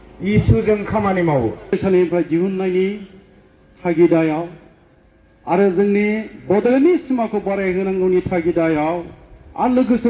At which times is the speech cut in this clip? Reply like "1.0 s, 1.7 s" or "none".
1.8 s